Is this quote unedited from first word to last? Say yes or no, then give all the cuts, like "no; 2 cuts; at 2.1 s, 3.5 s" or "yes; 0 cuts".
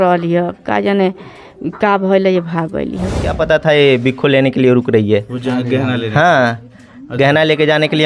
no; 1 cut; at 3.3 s